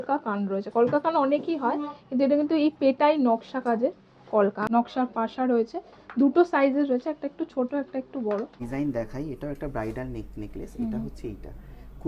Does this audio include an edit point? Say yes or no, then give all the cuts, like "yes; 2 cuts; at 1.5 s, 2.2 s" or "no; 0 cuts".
yes; 2 cuts; at 4.6 s, 8.6 s